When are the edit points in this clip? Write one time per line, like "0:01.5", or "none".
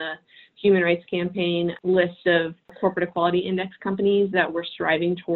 0:01.8
0:02.6